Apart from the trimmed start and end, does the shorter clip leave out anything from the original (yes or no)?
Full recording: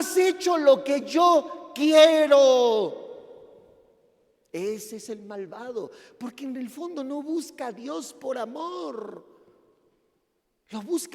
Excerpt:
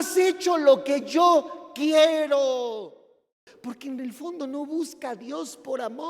yes